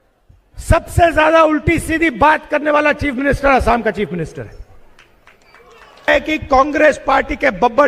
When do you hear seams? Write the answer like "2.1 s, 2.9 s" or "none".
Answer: 6.1 s